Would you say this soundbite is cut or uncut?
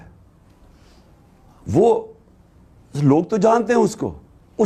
uncut